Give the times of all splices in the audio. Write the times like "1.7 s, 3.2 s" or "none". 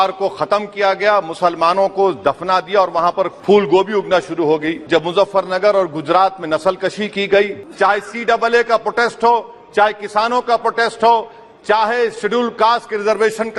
3.4 s, 4.8 s, 7.6 s